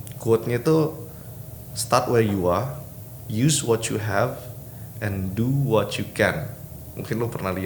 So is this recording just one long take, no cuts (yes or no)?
yes